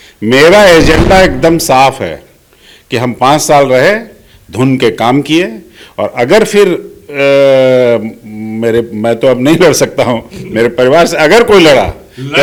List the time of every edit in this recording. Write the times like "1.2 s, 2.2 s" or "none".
none